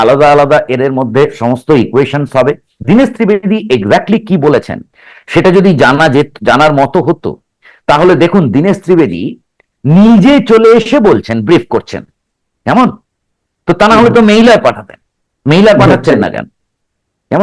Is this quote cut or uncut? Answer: uncut